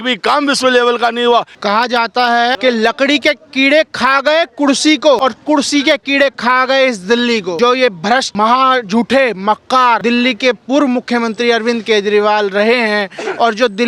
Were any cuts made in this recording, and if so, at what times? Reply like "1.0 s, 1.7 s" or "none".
1.5 s, 2.6 s, 5.2 s, 7.6 s, 8.3 s, 10.0 s